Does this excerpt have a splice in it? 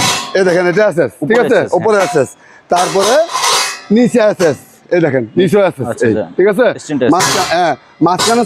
no; 0 cuts

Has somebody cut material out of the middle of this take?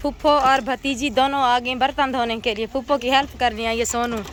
no; 0 cuts

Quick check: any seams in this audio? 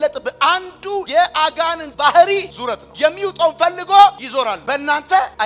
no; 0 cuts

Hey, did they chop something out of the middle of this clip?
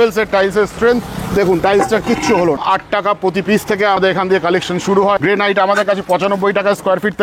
yes; 3 cuts; at 2.6 s, 4.0 s, 5.2 s

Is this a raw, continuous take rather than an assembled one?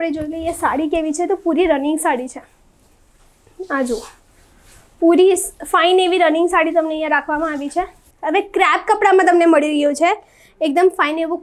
no; 1 cut; at 8.0 s

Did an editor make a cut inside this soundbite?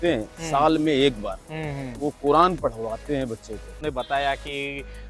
yes; 1 cut; at 3.8 s

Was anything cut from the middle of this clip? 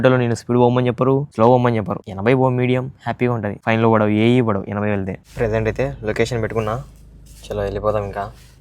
yes; 4 cuts; at 1.3 s, 2.0 s, 3.5 s, 5.2 s

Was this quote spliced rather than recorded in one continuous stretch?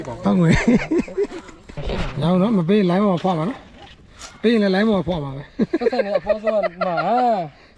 no; 0 cuts

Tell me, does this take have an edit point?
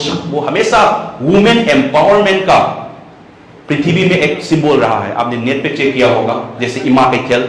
no; 0 cuts

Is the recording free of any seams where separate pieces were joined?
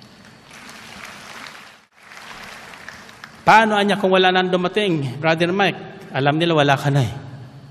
no; 1 cut; at 1.9 s

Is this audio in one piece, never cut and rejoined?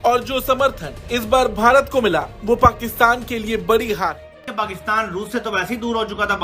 no; 1 cut; at 4.5 s

